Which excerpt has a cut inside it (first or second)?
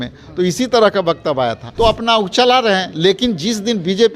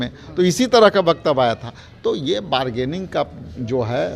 first